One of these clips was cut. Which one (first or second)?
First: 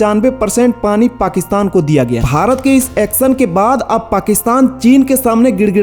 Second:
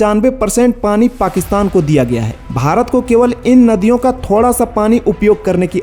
first